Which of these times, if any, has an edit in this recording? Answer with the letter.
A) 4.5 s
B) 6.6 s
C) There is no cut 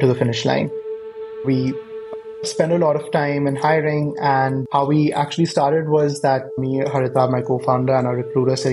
B